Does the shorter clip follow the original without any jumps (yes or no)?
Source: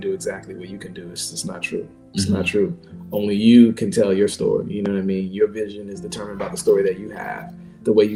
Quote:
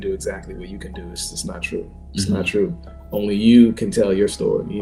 yes